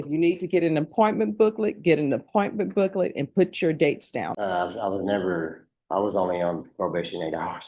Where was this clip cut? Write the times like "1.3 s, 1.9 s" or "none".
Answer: 4.3 s

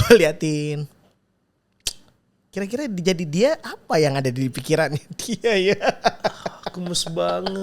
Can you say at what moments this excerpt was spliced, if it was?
none

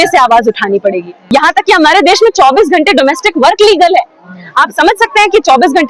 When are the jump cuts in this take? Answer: 1.2 s

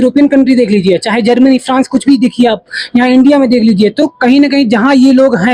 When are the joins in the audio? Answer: none

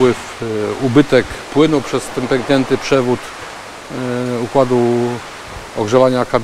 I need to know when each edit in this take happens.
none

